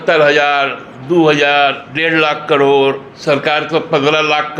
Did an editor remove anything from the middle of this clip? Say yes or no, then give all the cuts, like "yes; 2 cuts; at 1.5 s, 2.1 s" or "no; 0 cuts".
yes; 2 cuts; at 1.9 s, 3.1 s